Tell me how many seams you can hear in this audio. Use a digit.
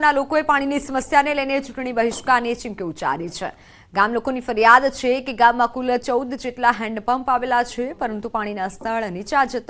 1